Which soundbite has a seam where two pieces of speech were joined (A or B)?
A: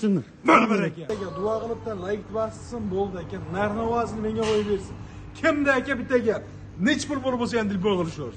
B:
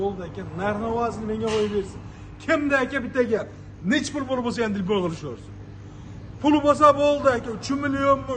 A